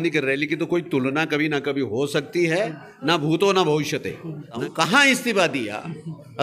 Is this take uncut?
no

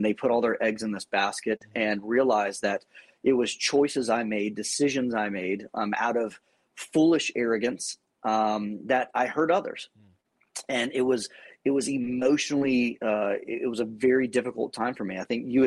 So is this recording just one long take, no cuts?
yes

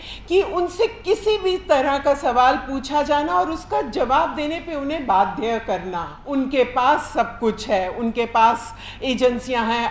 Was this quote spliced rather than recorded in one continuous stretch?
yes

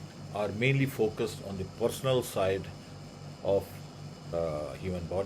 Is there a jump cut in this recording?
yes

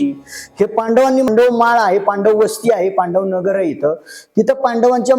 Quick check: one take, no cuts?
no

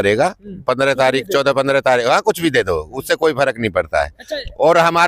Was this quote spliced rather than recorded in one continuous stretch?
no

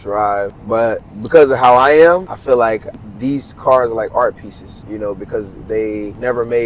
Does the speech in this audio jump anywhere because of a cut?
yes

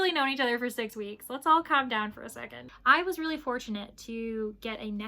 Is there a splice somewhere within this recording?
yes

